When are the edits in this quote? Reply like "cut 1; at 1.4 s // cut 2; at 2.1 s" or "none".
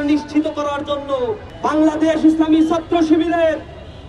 cut 1; at 1.5 s